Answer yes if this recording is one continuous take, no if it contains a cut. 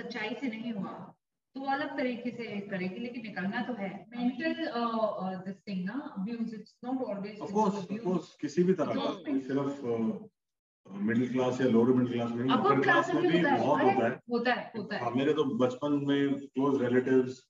no